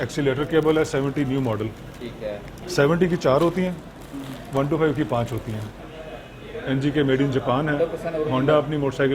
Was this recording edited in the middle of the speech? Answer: yes; 2 cuts; at 2.5 s, 5.8 s

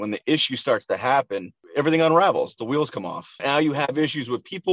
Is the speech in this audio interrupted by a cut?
yes; 1 cut; at 3.4 s

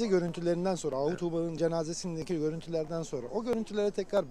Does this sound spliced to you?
no; 0 cuts

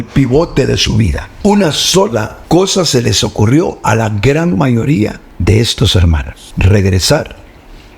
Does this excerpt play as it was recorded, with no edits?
no; 4 cuts; at 1.2 s, 2.4 s, 5.3 s, 6.4 s

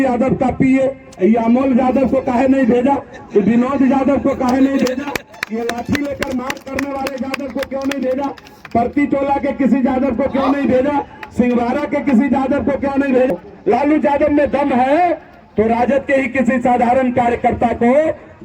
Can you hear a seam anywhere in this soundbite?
yes; 1 cut; at 13.3 s

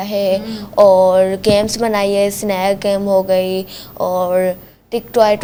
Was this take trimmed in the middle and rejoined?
no; 0 cuts

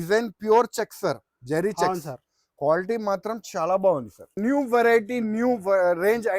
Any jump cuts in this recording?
yes; 1 cut; at 4.4 s

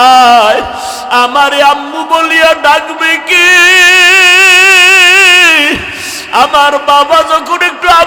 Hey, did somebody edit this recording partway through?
no; 0 cuts

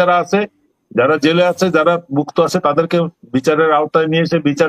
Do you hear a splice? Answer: no; 0 cuts

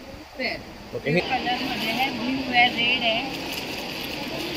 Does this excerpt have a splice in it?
yes; 1 cut; at 1.2 s

